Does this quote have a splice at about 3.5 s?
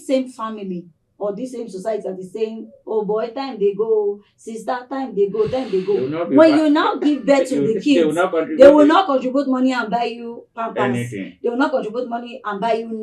no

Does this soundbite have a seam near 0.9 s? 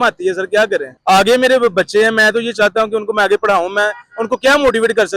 yes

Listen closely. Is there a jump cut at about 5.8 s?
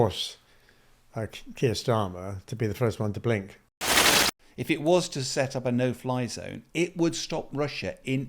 no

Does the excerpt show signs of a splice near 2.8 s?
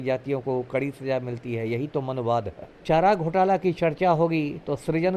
yes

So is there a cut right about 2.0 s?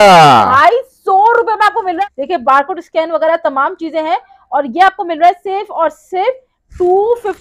yes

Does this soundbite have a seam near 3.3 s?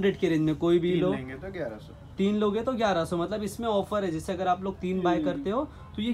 no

